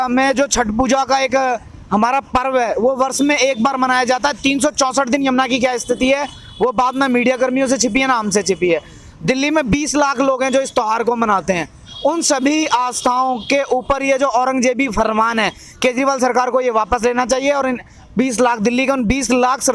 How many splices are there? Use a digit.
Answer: 0